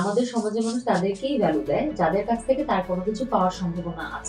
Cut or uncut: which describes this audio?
uncut